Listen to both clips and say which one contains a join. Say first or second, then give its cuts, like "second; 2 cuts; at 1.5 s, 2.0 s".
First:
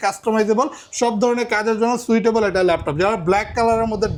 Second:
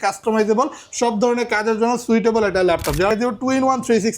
second; 1 cut; at 3.1 s